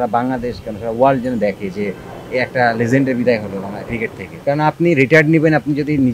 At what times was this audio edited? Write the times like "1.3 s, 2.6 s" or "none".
4.4 s